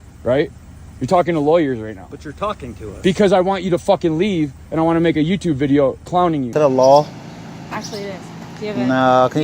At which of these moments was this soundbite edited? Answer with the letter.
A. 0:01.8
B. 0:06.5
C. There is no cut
B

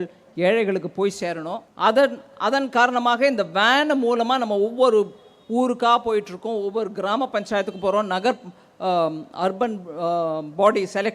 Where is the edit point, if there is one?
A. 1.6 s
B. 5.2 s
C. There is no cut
A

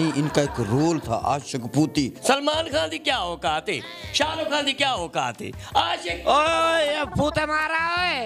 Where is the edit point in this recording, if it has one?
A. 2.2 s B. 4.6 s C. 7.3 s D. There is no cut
A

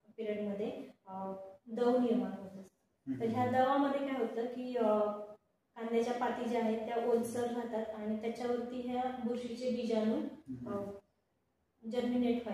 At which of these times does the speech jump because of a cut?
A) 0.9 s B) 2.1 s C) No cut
C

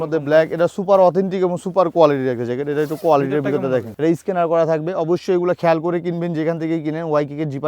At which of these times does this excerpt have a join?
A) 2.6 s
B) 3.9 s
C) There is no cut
B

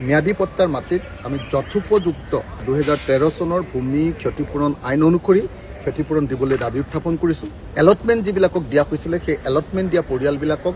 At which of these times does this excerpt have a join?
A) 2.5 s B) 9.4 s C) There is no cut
C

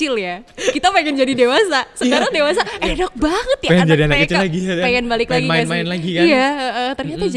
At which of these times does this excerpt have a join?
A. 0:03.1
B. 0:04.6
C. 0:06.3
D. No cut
D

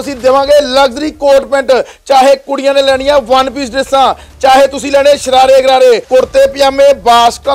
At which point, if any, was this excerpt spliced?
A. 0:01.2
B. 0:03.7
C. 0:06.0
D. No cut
C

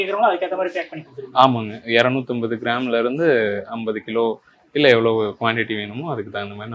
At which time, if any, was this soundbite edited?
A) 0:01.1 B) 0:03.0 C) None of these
C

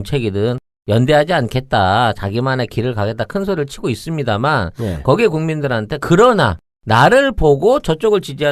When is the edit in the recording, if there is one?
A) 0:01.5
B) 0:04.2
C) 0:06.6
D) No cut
B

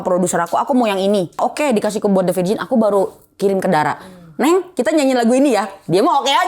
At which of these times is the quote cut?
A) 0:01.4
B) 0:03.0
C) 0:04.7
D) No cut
A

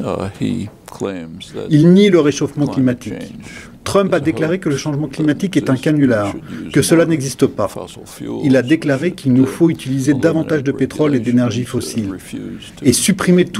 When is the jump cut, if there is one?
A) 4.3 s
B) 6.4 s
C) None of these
C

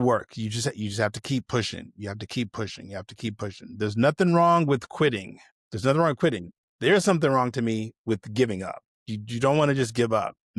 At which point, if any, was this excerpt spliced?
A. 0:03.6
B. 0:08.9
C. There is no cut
C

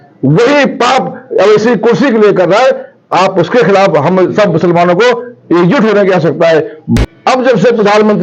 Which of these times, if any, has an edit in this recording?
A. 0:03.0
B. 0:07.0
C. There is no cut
B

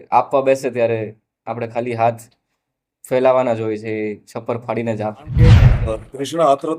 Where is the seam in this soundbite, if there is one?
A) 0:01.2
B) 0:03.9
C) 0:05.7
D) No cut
C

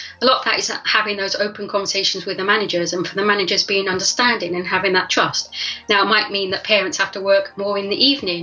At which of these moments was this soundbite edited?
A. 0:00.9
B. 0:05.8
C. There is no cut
C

